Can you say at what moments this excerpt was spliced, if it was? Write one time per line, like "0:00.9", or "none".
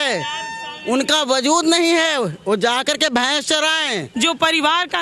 0:04.1